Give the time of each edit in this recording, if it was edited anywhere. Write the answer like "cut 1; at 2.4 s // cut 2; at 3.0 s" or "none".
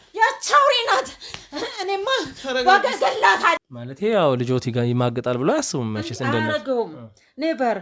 cut 1; at 3.6 s